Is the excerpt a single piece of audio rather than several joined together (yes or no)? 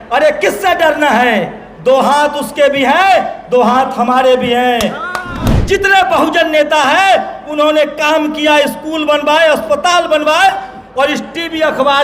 no